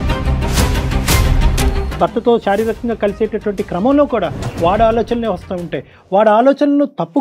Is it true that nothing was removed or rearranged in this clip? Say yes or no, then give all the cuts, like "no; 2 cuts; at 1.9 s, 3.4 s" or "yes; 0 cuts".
no; 1 cut; at 1.8 s